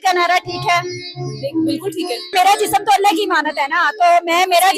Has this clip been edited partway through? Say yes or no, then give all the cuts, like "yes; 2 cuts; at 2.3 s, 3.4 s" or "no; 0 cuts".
yes; 1 cut; at 2.3 s